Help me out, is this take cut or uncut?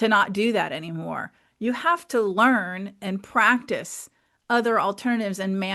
uncut